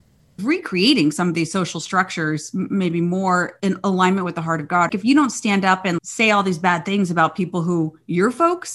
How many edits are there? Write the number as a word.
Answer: three